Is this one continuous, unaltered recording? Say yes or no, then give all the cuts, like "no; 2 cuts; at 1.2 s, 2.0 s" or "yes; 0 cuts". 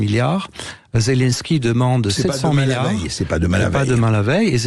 yes; 0 cuts